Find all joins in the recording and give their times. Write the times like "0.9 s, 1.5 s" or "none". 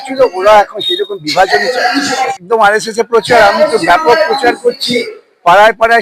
2.4 s